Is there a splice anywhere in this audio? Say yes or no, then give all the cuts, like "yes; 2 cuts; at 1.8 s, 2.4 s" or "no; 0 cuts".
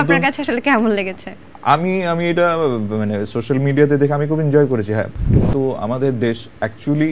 yes; 1 cut; at 5.3 s